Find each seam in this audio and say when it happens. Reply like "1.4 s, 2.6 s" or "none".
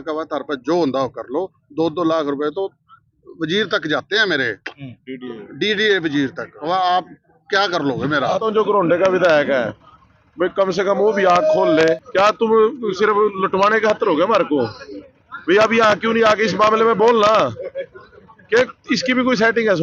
6.5 s, 8.3 s, 12.0 s